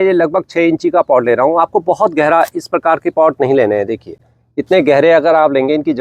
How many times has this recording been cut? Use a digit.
0